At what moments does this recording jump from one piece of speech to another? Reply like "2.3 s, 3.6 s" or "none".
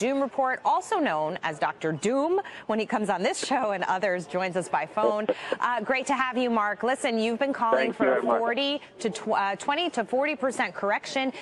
none